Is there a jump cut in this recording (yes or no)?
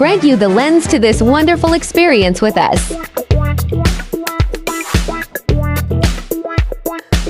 yes